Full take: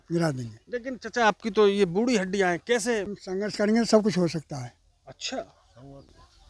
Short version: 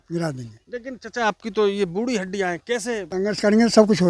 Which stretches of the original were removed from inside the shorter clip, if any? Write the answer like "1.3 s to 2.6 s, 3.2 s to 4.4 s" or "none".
3.1 s to 3.2 s